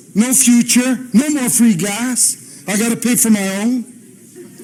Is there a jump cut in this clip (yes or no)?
no